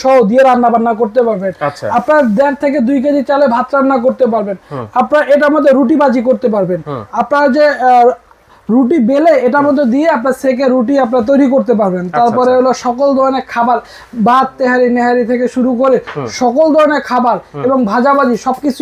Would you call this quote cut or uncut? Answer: uncut